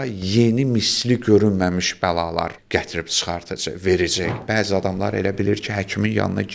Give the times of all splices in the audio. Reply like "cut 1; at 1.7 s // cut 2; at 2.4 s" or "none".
cut 1; at 2.6 s // cut 2; at 4.4 s